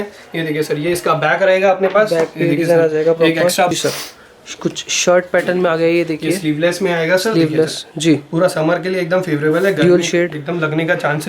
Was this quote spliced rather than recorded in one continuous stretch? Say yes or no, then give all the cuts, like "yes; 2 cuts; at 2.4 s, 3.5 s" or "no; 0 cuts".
yes; 1 cut; at 3.7 s